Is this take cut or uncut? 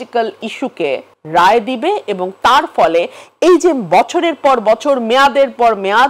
cut